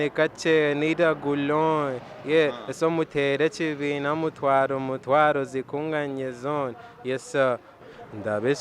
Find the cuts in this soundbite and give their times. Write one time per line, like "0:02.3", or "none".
0:07.7